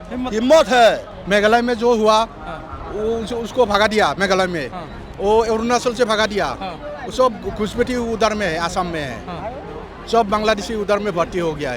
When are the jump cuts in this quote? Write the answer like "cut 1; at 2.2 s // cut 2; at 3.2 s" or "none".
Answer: cut 1; at 1.1 s